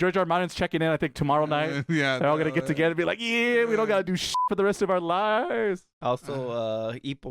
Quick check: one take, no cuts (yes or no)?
no